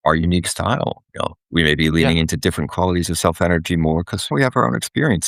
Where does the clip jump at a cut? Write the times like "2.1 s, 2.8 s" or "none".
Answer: 1.4 s, 4.3 s